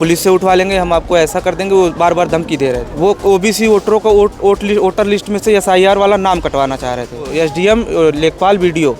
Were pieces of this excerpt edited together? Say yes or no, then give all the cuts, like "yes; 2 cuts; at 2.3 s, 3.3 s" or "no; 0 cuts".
yes; 2 cuts; at 2.9 s, 7.3 s